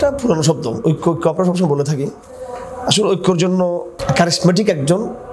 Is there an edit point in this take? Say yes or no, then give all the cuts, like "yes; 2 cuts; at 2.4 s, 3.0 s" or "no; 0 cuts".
yes; 1 cut; at 3.9 s